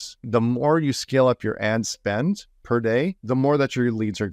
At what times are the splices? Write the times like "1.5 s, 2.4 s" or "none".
3.2 s